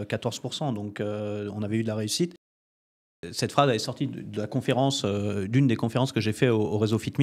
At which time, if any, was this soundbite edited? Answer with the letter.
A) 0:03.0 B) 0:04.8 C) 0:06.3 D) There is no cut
A